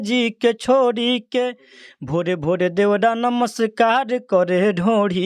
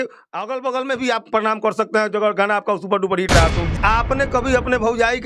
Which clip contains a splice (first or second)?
second